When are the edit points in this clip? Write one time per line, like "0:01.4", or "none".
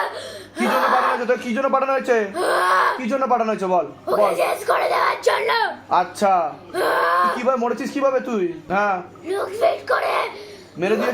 0:08.7